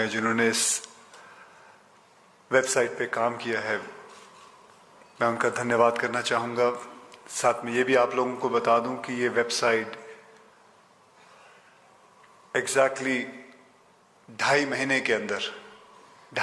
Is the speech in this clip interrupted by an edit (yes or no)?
yes